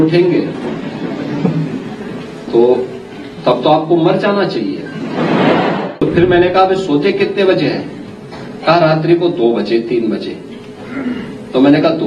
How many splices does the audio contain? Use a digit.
1